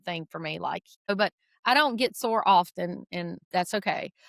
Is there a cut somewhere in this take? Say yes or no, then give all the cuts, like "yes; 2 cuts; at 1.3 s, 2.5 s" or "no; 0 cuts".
yes; 2 cuts; at 1.1 s, 3.4 s